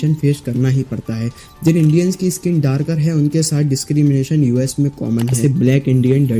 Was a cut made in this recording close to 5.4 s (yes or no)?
yes